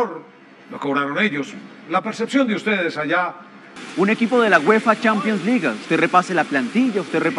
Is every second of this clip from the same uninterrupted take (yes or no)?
no